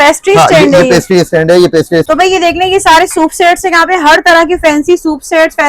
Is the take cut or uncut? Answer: cut